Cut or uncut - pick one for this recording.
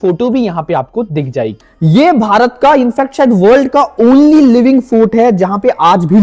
cut